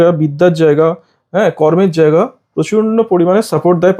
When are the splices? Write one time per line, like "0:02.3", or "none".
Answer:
none